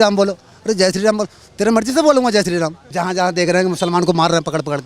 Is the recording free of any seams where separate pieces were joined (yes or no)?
no